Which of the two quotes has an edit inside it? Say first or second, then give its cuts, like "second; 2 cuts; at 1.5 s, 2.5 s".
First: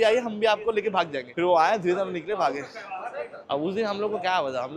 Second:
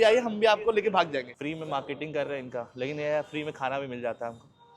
second; 1 cut; at 1.3 s